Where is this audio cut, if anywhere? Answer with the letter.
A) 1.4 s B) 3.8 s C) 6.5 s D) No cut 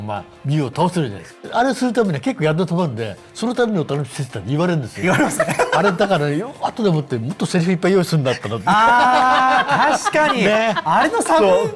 A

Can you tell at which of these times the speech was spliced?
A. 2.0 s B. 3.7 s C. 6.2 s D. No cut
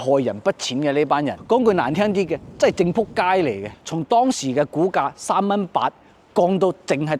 B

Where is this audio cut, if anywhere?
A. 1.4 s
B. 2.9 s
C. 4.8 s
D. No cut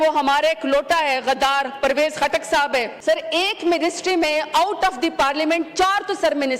B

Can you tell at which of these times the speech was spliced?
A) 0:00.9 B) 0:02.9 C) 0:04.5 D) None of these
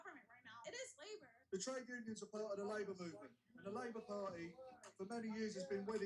A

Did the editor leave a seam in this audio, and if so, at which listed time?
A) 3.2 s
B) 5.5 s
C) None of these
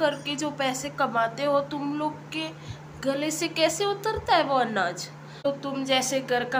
B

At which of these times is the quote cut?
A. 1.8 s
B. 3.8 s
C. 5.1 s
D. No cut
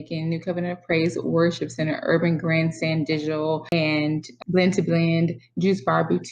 B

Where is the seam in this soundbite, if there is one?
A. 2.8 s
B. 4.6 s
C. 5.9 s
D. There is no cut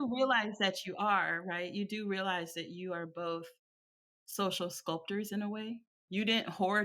C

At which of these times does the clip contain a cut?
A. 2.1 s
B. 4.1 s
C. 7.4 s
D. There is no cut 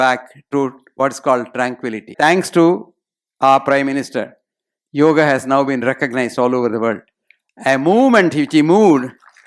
A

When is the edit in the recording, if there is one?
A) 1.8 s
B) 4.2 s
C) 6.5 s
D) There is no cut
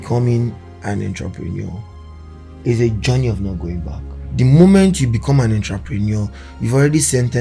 B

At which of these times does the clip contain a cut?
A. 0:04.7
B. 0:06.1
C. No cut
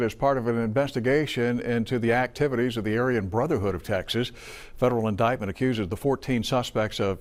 C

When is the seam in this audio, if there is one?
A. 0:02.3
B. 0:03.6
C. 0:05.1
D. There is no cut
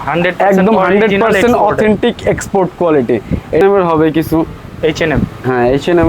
B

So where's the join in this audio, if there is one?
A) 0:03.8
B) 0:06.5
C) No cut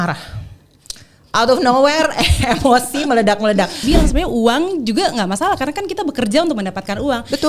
A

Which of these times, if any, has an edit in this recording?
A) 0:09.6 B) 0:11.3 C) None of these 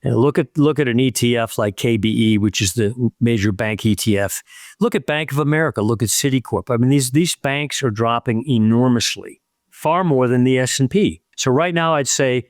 B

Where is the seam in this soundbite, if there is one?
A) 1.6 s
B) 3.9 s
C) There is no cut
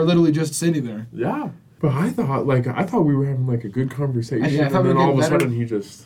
A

